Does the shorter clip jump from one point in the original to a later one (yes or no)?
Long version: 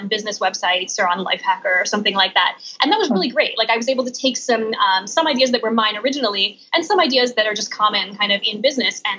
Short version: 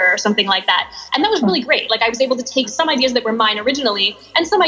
yes